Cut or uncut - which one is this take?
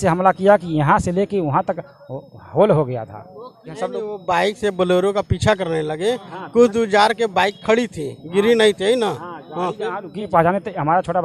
cut